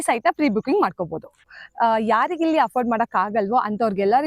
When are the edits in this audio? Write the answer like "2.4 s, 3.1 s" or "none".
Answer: 1.5 s